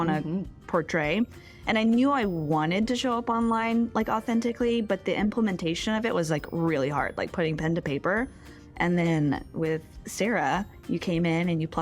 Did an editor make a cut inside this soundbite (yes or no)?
yes